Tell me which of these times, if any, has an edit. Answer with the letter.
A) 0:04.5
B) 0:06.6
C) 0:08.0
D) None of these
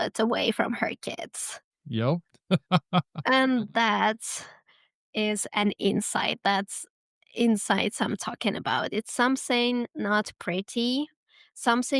D